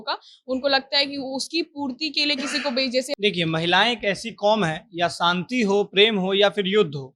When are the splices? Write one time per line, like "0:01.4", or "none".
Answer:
0:03.1